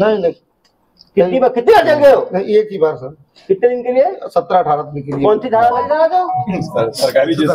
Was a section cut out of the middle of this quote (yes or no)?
yes